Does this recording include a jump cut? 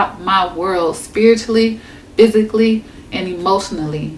no; 0 cuts

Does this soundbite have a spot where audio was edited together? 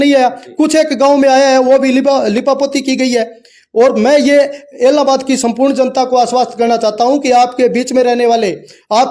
no; 0 cuts

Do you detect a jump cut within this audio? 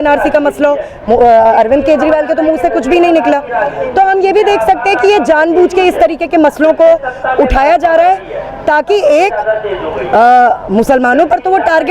no; 0 cuts

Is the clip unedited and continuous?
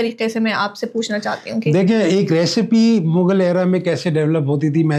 yes; 0 cuts

